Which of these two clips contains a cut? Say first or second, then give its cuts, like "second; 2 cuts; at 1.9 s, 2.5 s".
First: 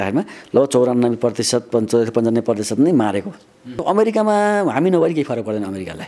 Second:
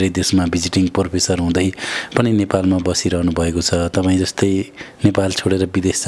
first; 1 cut; at 3.8 s